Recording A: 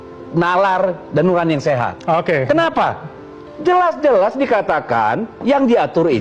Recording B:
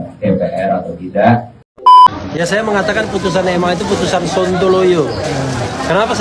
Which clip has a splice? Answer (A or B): B